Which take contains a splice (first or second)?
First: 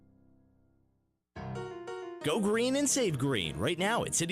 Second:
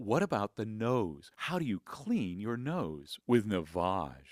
first